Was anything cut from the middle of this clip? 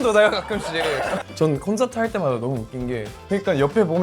yes; 2 cuts; at 1.0 s, 3.1 s

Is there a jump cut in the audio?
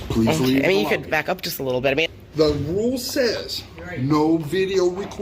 yes; 1 cut; at 2.1 s

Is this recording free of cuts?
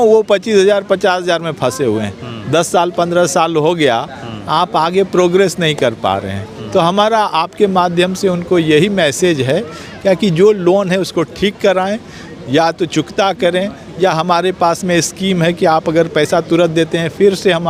yes; 0 cuts

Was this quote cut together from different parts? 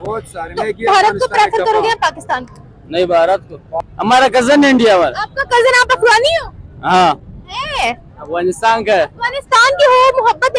yes; 1 cut; at 3.6 s

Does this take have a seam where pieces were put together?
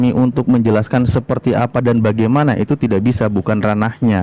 no; 0 cuts

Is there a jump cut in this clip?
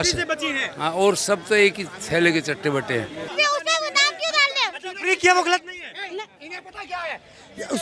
yes; 1 cut; at 3.3 s

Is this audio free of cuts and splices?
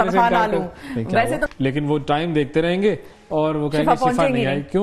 no; 1 cut; at 1.4 s

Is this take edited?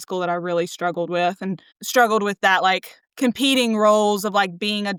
no; 0 cuts

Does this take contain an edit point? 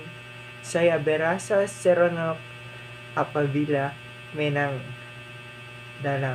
no; 0 cuts

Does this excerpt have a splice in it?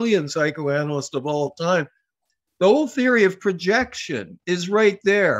no; 0 cuts

